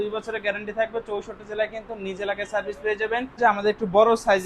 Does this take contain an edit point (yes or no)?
yes